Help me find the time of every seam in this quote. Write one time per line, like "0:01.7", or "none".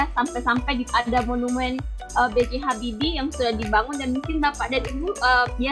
none